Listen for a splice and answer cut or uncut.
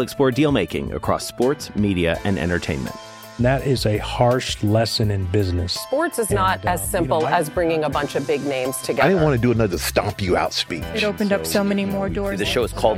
uncut